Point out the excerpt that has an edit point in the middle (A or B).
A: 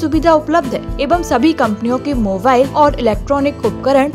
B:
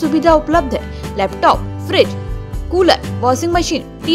A